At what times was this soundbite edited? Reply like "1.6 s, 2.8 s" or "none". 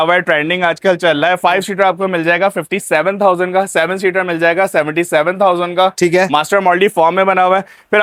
none

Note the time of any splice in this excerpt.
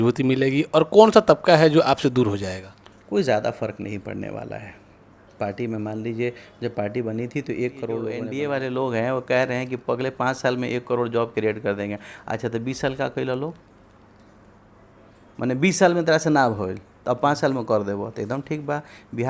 8.2 s

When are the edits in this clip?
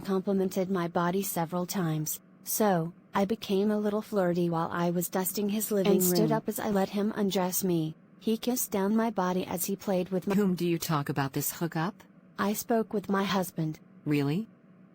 6.2 s, 10.3 s

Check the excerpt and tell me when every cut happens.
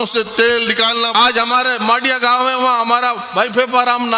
1.1 s

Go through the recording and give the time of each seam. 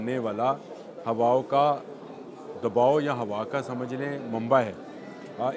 none

